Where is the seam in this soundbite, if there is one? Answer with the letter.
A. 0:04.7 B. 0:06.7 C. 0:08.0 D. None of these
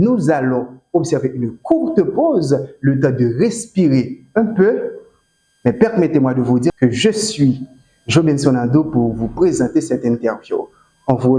B